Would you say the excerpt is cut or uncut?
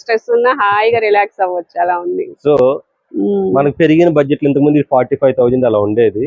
uncut